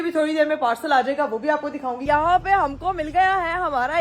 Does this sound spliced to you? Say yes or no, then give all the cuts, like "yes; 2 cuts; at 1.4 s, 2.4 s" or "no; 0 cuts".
yes; 1 cut; at 2.0 s